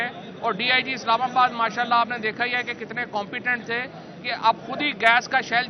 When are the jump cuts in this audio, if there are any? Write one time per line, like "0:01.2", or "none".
none